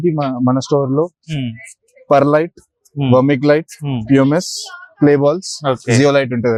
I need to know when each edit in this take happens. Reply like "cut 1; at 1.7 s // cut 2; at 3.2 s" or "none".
none